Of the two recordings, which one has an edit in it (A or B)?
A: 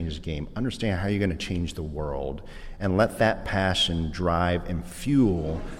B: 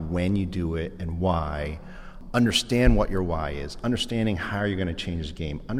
B